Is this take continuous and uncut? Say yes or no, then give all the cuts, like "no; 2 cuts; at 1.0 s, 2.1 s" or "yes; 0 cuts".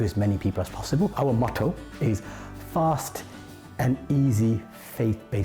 no; 1 cut; at 1.1 s